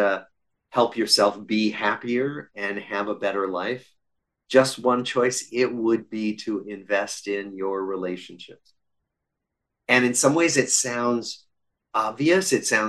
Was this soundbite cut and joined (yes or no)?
no